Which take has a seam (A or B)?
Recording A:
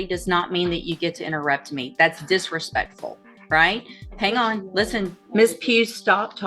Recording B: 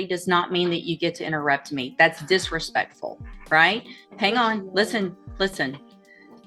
A